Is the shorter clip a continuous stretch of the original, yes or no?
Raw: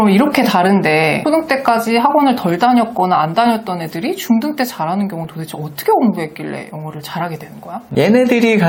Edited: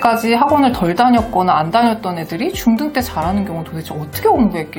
yes